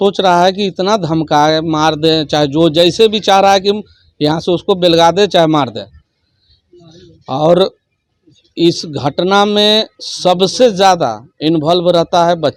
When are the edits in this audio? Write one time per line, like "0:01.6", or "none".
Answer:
none